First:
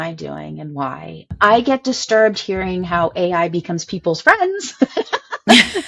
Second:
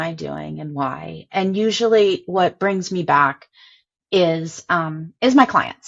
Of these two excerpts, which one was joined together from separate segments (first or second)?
first